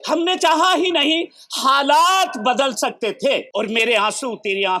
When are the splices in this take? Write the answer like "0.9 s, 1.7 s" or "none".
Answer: 3.5 s

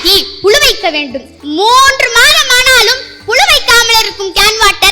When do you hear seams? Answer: 1.3 s

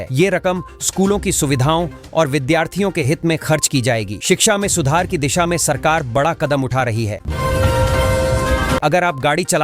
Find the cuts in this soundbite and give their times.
7.2 s, 8.8 s

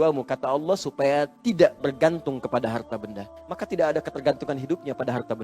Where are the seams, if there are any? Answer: 3.4 s

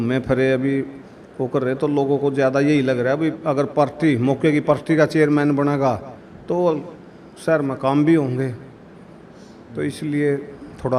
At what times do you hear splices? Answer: none

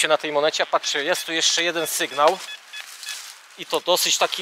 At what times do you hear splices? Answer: none

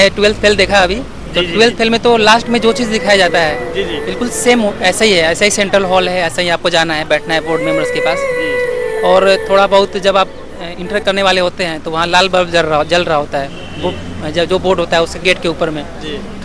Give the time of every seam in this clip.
none

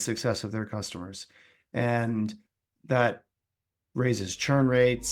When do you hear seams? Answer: 2.6 s

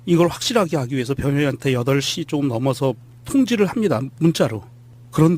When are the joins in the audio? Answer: 3.2 s

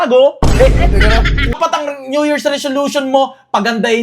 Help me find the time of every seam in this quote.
1.6 s

